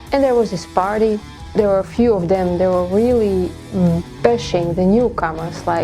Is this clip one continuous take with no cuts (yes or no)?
no